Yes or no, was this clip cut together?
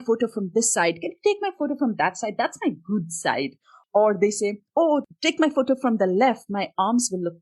yes